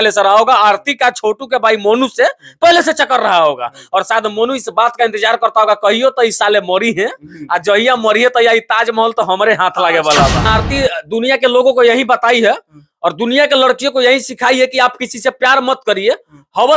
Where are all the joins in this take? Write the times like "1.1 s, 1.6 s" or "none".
10.5 s

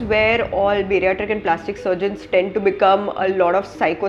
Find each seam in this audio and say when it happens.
none

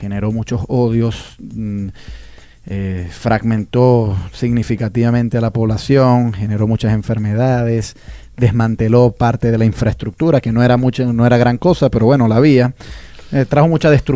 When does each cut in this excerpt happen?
7.2 s

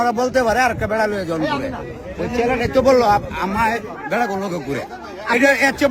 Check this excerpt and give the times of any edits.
none

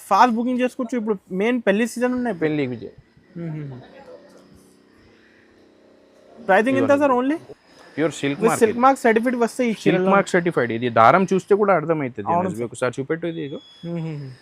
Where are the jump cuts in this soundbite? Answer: 7.4 s

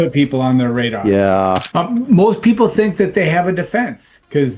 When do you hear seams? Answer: 1.7 s

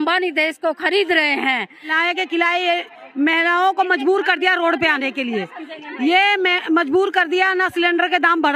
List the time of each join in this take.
1.9 s

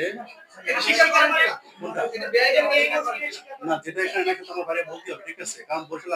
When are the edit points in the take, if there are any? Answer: none

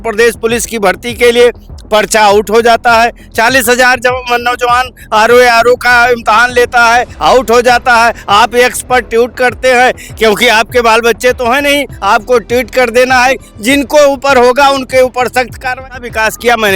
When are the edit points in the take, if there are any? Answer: 15.8 s

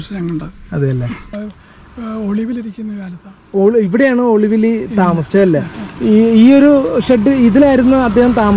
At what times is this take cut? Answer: 1.3 s

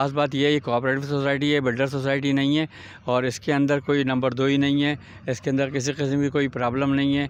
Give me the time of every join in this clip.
none

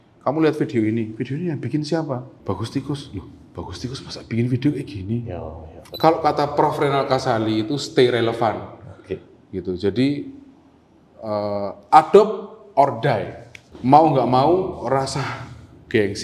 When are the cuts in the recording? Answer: 5.8 s

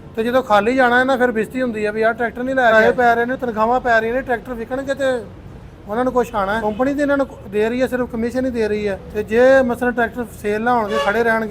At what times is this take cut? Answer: 2.7 s, 6.6 s, 9.1 s

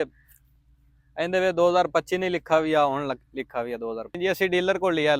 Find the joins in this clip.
4.1 s

